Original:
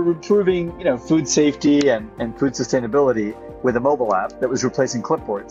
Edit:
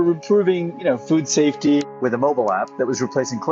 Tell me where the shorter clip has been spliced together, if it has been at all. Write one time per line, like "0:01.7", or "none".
0:01.8